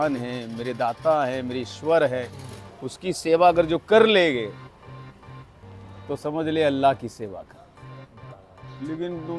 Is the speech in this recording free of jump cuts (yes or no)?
yes